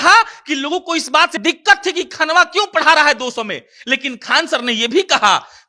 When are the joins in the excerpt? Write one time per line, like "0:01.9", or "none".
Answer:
0:01.3